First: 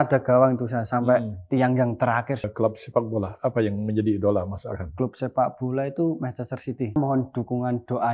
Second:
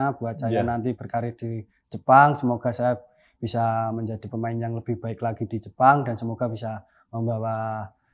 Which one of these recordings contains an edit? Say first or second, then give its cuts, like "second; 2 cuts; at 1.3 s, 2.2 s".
first; 2 cuts; at 2.5 s, 7.0 s